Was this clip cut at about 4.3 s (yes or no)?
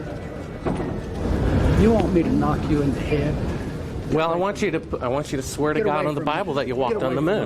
no